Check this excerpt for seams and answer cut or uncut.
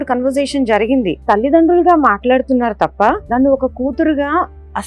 cut